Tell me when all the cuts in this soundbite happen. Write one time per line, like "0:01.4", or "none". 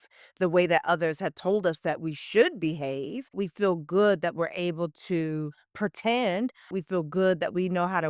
0:03.4
0:06.7